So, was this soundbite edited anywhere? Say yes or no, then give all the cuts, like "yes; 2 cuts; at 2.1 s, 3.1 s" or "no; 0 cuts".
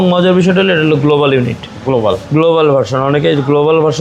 no; 0 cuts